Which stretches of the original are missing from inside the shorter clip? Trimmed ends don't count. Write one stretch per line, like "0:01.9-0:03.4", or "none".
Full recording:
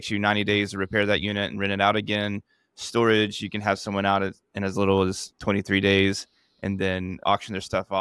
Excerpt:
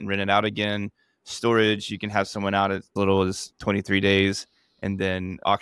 0:04.4-0:04.7